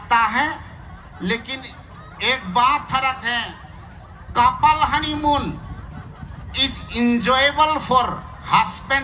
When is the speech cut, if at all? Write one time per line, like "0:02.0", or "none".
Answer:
none